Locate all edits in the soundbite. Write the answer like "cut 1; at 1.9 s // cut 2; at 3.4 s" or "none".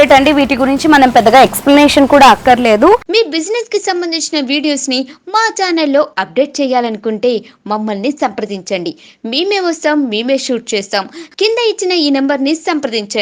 cut 1; at 3.1 s